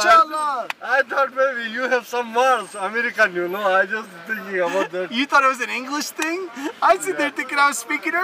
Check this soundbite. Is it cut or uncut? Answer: uncut